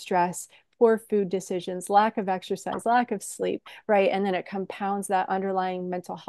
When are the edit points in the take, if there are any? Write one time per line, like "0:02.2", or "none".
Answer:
none